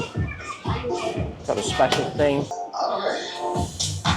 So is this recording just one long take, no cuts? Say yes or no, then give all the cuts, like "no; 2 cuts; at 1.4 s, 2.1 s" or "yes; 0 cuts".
no; 1 cut; at 2.6 s